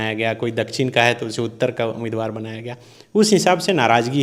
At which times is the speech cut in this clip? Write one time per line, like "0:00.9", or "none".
none